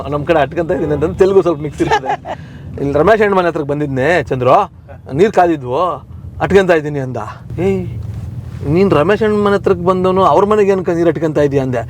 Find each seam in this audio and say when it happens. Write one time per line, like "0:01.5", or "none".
0:07.4